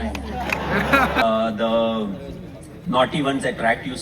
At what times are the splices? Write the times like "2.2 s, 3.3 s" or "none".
1.2 s